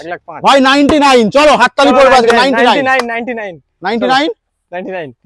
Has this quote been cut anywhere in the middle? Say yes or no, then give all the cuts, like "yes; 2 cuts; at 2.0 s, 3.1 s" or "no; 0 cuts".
no; 0 cuts